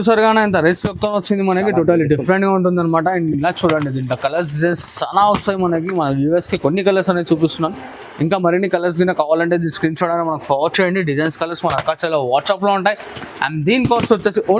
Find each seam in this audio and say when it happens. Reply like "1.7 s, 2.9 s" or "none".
none